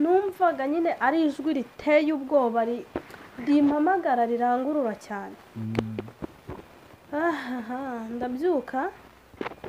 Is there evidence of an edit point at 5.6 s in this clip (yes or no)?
no